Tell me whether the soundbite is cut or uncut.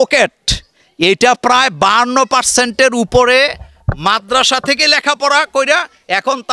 uncut